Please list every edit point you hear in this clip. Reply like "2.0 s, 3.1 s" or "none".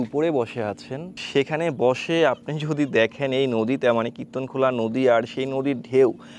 1.2 s